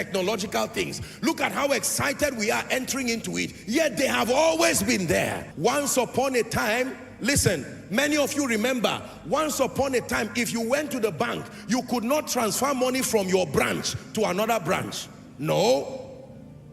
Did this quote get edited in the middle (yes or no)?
yes